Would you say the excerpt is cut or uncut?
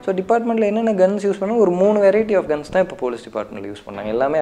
uncut